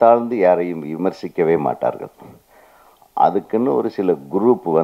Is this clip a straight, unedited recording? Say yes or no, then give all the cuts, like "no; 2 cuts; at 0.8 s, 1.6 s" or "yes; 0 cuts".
yes; 0 cuts